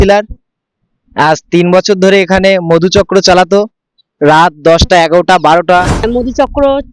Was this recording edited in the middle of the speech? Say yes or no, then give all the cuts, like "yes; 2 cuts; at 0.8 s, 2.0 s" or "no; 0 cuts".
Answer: yes; 1 cut; at 6.0 s